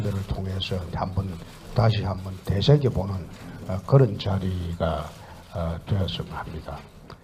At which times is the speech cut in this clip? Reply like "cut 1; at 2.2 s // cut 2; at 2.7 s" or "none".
cut 1; at 1.1 s